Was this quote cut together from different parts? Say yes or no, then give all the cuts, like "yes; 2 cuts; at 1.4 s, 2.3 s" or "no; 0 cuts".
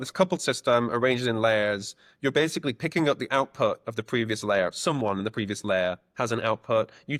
no; 0 cuts